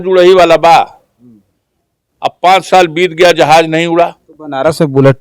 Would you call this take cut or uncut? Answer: uncut